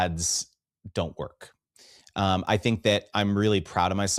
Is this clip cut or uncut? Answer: uncut